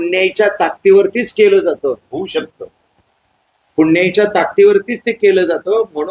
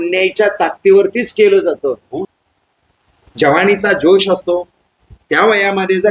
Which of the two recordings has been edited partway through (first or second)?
second